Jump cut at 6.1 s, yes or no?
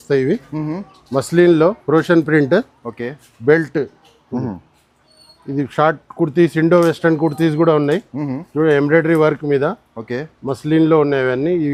no